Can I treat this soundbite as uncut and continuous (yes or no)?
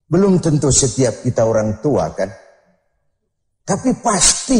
no